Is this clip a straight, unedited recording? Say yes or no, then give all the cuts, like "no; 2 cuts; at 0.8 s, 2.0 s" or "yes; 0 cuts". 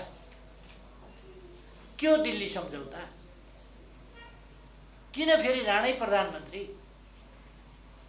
yes; 0 cuts